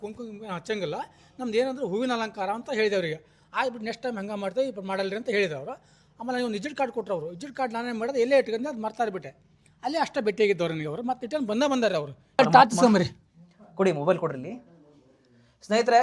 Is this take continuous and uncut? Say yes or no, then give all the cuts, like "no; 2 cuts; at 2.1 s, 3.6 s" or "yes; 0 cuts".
no; 1 cut; at 12.2 s